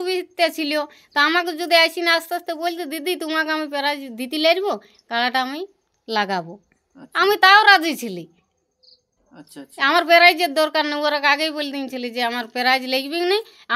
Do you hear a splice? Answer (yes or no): no